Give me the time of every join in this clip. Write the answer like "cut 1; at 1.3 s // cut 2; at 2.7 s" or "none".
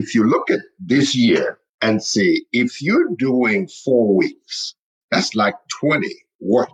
cut 1; at 1.7 s // cut 2; at 4.9 s